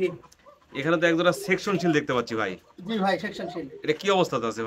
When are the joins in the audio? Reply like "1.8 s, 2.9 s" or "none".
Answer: none

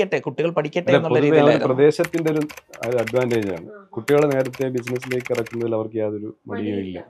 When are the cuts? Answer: none

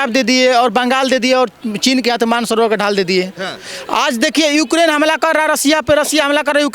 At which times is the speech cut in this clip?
none

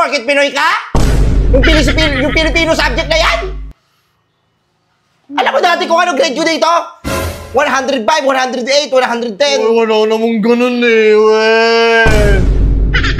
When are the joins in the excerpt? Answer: none

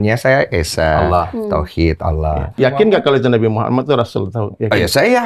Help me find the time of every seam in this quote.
2.6 s

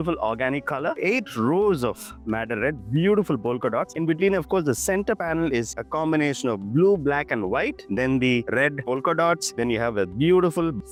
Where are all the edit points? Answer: none

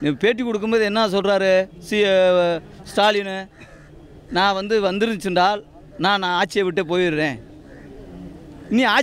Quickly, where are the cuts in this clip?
none

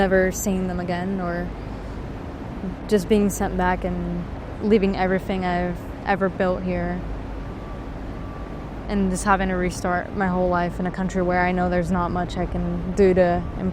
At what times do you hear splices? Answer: none

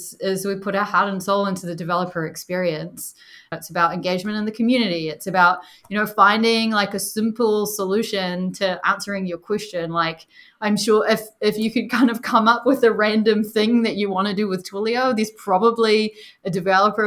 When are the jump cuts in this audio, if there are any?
3.5 s

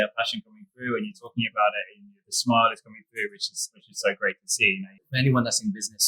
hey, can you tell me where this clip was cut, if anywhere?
5.0 s

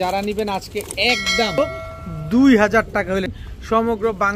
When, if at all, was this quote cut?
1.6 s, 3.3 s

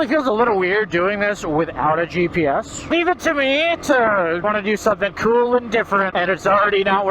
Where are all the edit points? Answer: 2.9 s, 4.4 s, 6.1 s

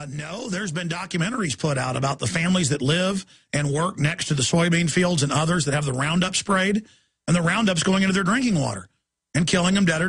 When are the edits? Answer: none

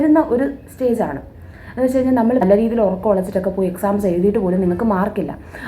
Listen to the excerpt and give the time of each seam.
2.4 s

